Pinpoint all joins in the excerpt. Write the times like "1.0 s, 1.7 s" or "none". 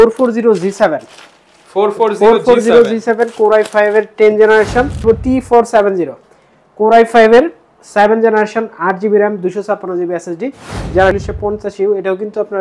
5.0 s, 11.2 s